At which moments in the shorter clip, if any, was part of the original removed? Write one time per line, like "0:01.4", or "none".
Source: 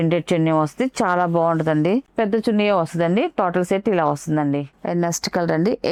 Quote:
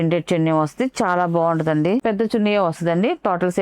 0:02.0